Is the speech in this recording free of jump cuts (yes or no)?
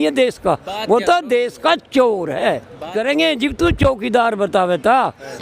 no